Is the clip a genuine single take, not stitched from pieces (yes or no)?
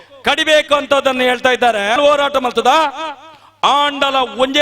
no